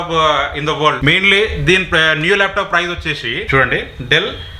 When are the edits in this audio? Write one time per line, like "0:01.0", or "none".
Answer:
0:01.0
0:03.4